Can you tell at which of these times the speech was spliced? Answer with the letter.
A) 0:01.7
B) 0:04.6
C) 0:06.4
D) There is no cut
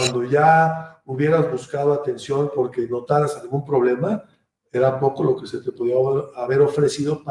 D